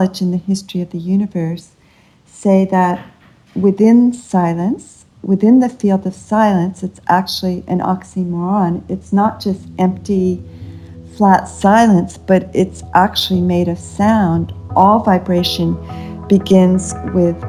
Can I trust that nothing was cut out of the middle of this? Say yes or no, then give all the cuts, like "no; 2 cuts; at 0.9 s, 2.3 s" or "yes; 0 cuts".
yes; 0 cuts